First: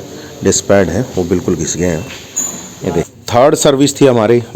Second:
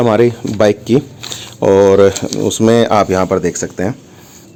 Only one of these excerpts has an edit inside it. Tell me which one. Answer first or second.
first